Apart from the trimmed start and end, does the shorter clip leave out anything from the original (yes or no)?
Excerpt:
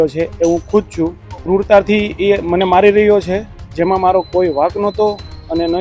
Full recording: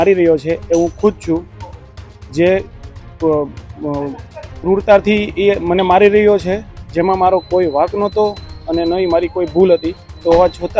yes